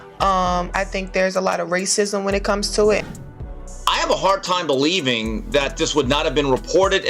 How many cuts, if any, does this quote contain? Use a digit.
1